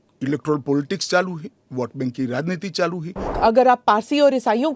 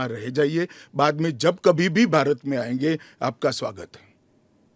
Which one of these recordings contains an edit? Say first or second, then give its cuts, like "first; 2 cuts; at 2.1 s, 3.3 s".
first; 1 cut; at 3.3 s